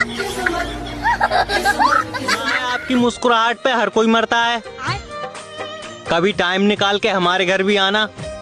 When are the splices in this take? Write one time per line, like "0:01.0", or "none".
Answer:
0:02.7